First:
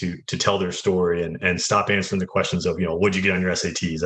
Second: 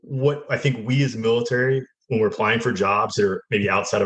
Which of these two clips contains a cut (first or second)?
first